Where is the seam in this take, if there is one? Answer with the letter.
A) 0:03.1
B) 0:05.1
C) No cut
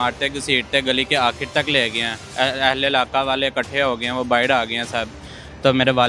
C